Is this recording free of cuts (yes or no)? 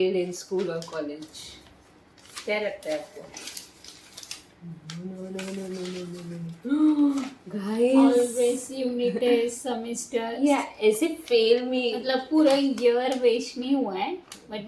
yes